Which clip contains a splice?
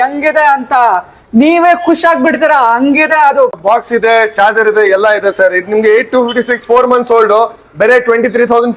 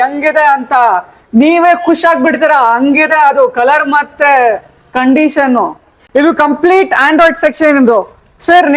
first; 1 cut; at 3.6 s

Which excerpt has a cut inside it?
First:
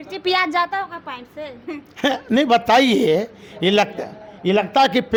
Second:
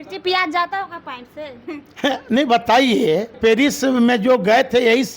second; 1 cut; at 3.4 s

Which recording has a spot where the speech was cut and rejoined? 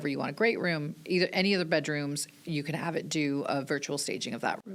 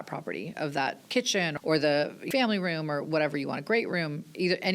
second; 2 cuts; at 1.4 s, 2.3 s

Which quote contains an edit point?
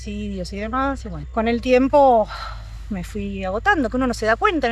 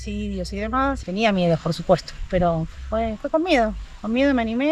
second; 1 cut; at 1.0 s

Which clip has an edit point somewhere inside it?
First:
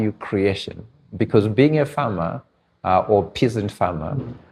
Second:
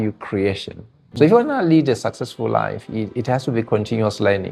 second; 1 cut; at 1.1 s

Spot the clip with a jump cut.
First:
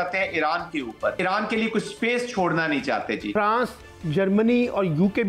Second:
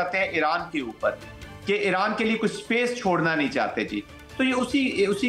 first; 2 cuts; at 1.2 s, 3.3 s

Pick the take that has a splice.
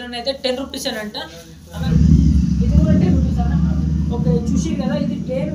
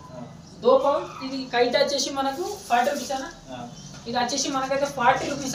first; 1 cut; at 1.8 s

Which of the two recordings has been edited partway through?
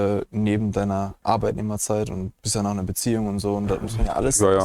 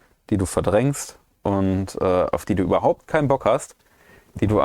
first; 2 cuts; at 1.2 s, 2.4 s

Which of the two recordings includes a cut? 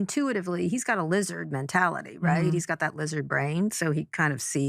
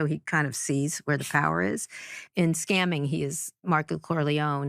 second; 1 cut; at 2.2 s

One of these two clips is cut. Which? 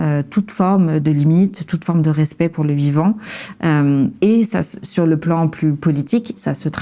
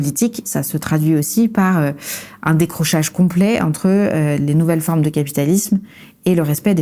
first; 1 cut; at 1.0 s

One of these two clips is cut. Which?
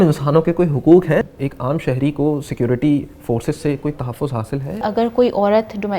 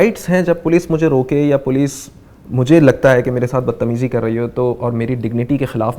first; 2 cuts; at 1.3 s, 4.8 s

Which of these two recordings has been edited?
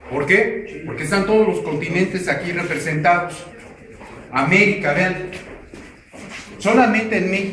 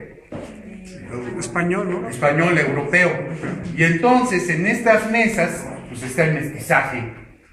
first; 1 cut; at 6.5 s

